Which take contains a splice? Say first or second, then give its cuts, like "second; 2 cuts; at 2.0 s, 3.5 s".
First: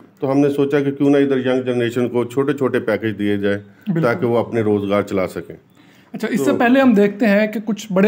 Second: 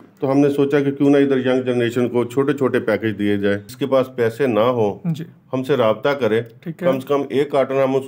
second; 1 cut; at 3.7 s